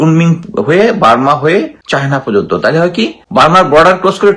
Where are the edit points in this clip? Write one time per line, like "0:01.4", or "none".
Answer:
0:01.8
0:03.2

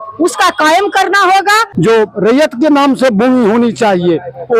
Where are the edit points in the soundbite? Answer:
0:01.7

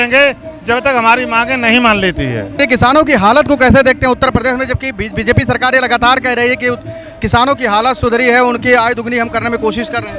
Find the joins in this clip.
0:02.6

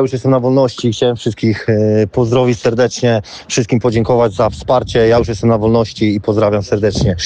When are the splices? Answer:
none

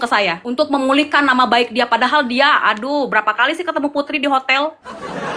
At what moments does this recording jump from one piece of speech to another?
none

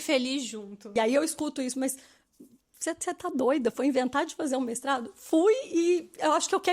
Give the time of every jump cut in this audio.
0:00.9

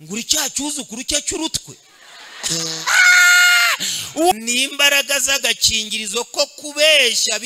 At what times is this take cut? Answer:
0:04.3

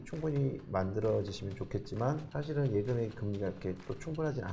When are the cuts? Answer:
0:02.3

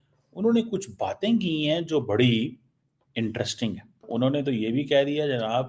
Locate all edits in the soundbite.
0:04.1

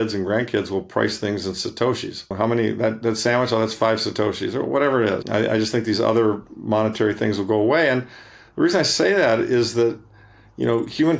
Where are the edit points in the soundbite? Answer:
0:02.3
0:05.2

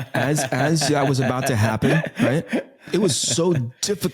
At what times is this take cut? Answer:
0:02.8

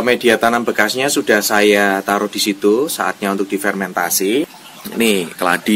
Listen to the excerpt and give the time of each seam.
0:04.5

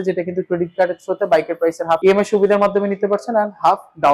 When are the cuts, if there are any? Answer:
0:02.0

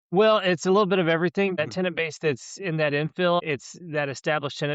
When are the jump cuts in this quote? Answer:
0:01.6
0:03.4

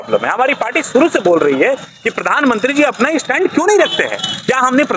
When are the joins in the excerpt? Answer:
none

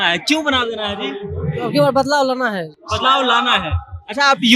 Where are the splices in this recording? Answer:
none

